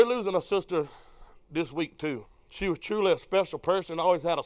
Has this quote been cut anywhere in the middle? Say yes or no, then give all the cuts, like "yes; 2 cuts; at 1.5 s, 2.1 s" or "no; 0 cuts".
yes; 1 cut; at 2.4 s